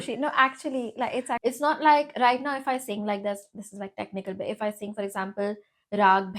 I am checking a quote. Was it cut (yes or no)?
yes